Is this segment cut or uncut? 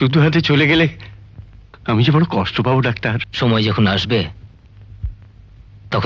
cut